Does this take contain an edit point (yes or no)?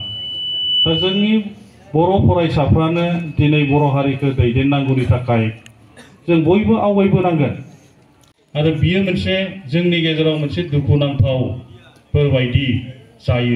yes